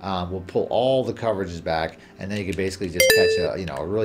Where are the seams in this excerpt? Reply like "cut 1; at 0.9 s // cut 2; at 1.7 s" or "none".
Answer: none